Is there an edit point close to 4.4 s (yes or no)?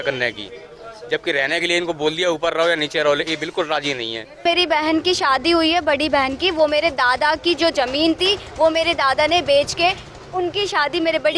yes